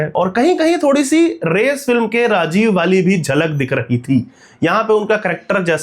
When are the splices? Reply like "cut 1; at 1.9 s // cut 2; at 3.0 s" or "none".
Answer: none